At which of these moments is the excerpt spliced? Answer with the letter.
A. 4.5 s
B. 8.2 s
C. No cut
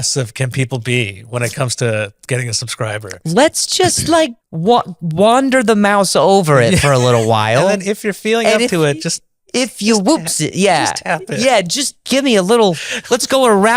A